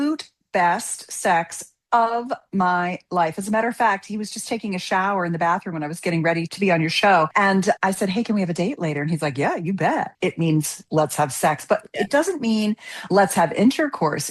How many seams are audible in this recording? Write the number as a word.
two